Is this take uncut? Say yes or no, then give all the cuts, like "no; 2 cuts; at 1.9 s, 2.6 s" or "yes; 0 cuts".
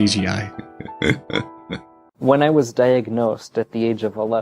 no; 1 cut; at 2.0 s